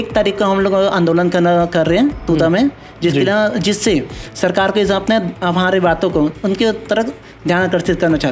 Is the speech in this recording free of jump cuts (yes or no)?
yes